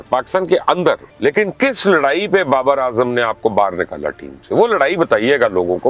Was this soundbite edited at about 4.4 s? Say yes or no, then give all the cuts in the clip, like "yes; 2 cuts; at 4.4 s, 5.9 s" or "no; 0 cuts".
no; 1 cut; at 1.1 s